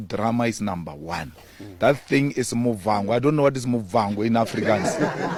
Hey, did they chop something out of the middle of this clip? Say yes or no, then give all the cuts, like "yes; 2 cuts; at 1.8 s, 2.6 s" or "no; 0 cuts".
no; 0 cuts